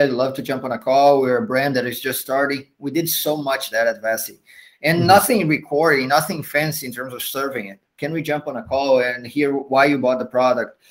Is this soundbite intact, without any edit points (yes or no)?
yes